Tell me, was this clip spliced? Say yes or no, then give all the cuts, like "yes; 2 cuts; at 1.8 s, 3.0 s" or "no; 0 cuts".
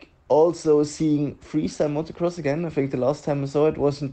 no; 0 cuts